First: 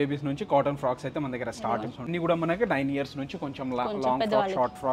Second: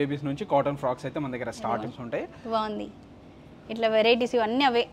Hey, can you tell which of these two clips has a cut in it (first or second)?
first